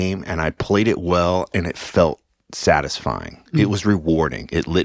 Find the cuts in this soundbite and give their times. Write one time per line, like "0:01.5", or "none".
none